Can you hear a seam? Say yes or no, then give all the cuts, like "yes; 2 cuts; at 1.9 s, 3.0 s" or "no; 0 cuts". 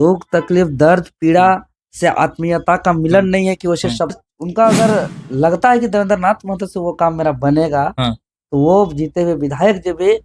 yes; 1 cut; at 4.2 s